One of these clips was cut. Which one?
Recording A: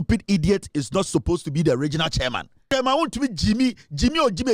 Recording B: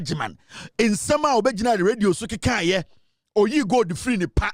A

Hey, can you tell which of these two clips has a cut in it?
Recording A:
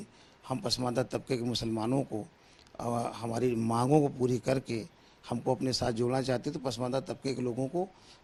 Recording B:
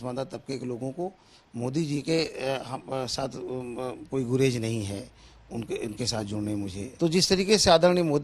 B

